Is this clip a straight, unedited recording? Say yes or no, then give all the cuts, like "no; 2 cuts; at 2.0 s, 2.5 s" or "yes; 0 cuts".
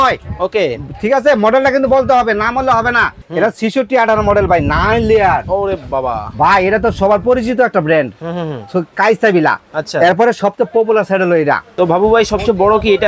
no; 2 cuts; at 3.2 s, 11.7 s